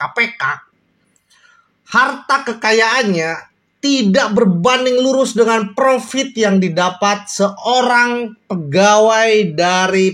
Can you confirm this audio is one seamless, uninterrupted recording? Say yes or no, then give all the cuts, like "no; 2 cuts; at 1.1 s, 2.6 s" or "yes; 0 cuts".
yes; 0 cuts